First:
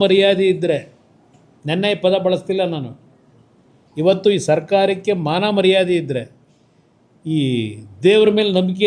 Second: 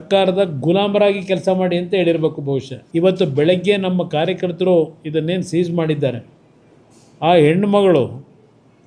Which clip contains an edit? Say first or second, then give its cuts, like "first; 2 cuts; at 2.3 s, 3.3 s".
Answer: second; 1 cut; at 2.8 s